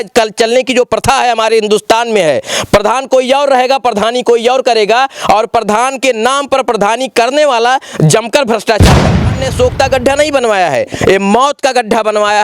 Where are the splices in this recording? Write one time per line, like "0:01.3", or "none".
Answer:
0:09.2